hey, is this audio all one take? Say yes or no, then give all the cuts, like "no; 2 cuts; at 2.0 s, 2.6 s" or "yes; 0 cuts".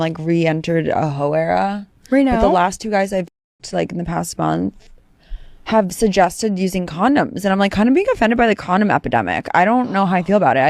yes; 0 cuts